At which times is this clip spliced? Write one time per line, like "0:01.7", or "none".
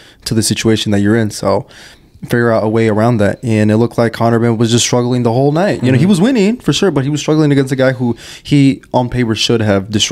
none

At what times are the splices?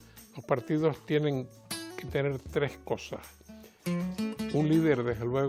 none

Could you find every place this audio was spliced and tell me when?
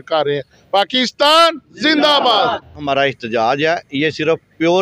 0:02.8

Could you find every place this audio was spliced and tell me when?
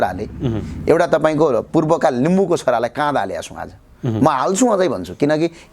none

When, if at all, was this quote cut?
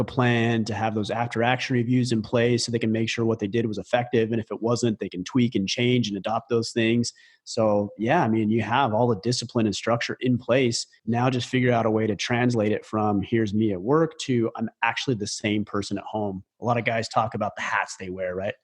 0:10.9

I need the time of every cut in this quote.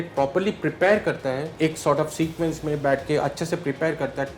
0:01.5

